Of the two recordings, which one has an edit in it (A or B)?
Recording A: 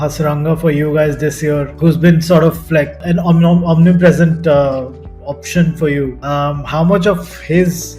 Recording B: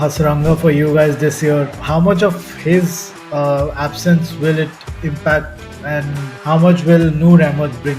B